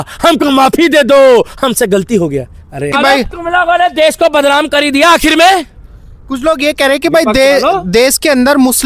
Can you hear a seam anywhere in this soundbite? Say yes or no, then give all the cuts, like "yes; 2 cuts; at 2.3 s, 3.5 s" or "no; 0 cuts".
yes; 1 cut; at 2.9 s